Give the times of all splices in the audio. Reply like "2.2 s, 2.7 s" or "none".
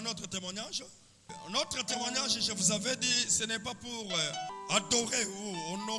1.3 s, 4.5 s